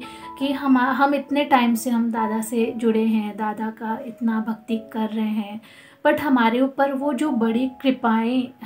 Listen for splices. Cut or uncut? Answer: uncut